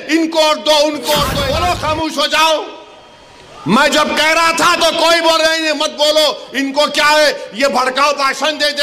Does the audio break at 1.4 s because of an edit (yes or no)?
yes